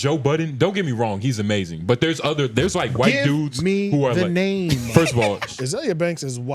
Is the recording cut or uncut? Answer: cut